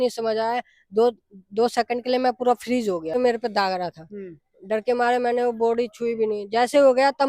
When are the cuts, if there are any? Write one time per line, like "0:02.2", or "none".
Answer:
0:03.1